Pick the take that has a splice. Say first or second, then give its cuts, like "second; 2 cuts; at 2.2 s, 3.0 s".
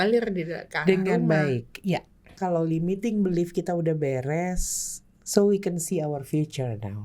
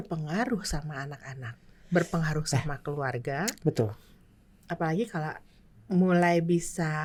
first; 1 cut; at 2.3 s